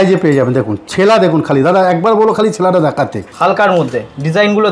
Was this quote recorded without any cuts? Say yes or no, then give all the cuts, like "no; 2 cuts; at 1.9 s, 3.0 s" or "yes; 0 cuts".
no; 1 cut; at 3.3 s